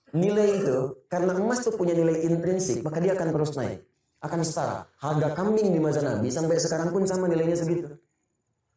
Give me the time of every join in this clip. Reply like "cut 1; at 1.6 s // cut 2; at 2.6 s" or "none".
none